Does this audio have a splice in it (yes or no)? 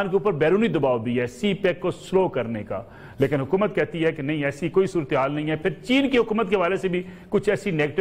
no